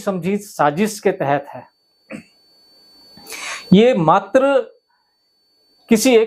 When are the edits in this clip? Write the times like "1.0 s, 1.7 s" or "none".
none

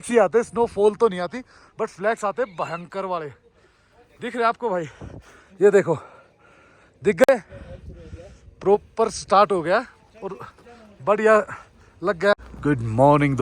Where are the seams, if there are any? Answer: none

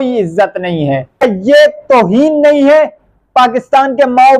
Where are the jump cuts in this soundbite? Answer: 1.2 s

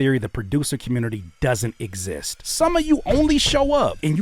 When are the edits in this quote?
2.4 s

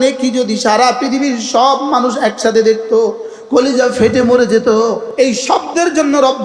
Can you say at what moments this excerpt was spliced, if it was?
5.1 s

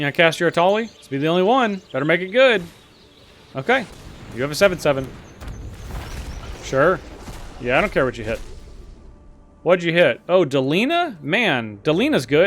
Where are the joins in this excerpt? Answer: 1.0 s, 1.8 s

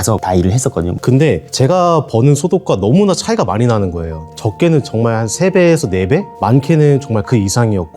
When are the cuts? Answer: 0.9 s

